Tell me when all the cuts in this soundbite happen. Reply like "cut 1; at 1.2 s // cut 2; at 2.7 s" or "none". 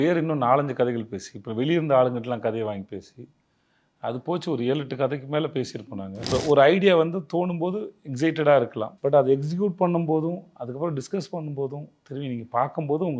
cut 1; at 6.3 s // cut 2; at 8.8 s